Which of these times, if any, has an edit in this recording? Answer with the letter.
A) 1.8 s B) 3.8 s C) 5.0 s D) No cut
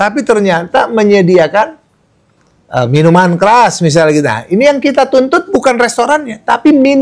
D